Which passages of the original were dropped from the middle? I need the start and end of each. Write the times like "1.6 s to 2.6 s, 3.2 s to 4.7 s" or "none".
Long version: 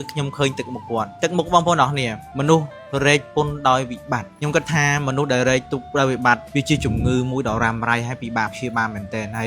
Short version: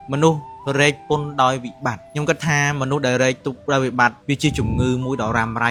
none